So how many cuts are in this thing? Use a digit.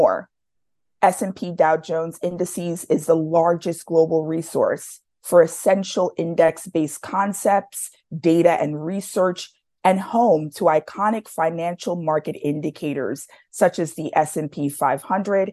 0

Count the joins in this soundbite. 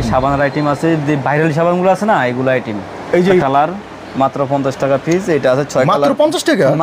1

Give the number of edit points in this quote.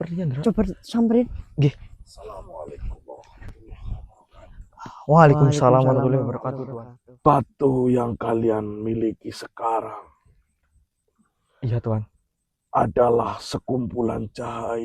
1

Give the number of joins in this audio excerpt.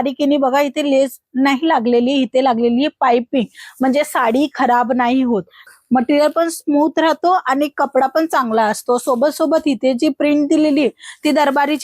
1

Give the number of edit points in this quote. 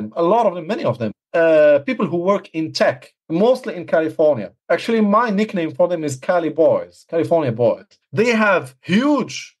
4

